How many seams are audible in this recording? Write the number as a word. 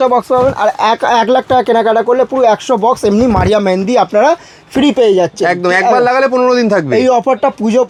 zero